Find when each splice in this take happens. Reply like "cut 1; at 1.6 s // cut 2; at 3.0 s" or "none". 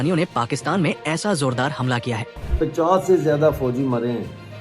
cut 1; at 2.5 s